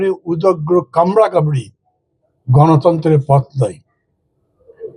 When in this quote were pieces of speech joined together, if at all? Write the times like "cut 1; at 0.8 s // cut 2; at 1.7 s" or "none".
none